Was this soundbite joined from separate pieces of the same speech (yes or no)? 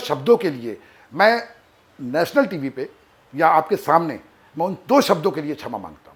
no